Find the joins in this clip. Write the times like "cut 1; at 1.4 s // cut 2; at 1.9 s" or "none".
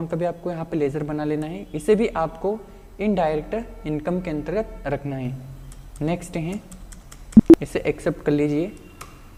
none